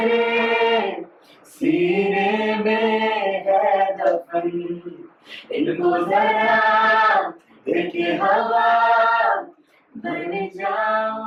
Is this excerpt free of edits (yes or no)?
yes